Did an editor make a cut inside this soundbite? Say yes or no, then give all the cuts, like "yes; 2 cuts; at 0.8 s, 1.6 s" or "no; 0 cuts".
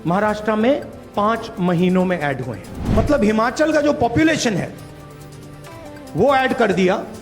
yes; 1 cut; at 2.8 s